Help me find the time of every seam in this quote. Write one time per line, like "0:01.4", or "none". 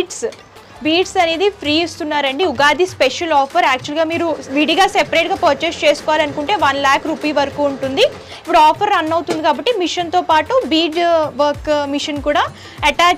none